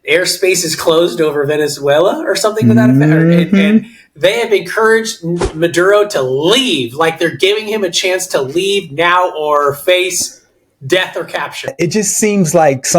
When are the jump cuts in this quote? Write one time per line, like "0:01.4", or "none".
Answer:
0:11.7